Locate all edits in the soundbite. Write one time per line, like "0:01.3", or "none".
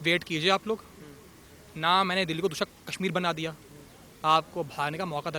none